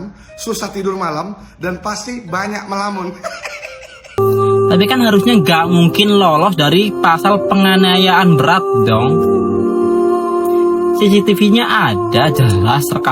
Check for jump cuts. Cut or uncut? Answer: cut